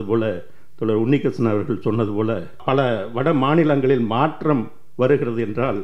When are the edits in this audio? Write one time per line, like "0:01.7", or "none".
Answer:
0:02.6